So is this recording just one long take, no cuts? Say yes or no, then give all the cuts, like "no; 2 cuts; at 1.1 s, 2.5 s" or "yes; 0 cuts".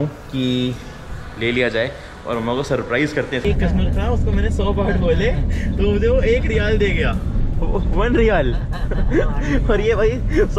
no; 1 cut; at 3.4 s